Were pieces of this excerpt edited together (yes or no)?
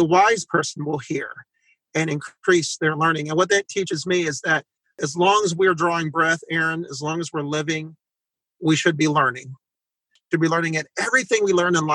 no